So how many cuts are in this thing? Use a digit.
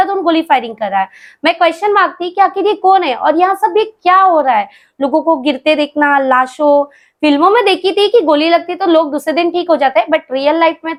0